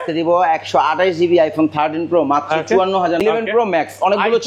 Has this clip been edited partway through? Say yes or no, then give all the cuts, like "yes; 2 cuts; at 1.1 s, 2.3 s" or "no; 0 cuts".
yes; 1 cut; at 3.2 s